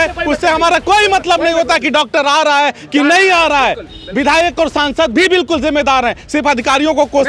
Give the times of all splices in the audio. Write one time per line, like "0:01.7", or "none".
none